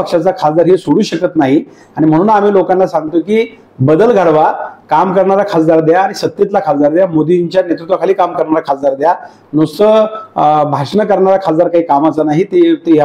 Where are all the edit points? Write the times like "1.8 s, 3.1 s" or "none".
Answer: none